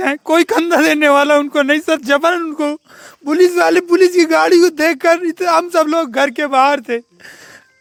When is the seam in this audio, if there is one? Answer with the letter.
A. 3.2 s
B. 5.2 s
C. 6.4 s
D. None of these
D